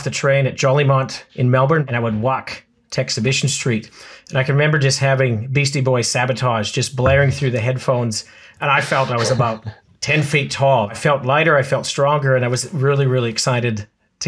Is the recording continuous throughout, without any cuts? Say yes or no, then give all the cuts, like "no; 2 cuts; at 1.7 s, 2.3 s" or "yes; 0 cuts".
no; 2 cuts; at 1.8 s, 11.0 s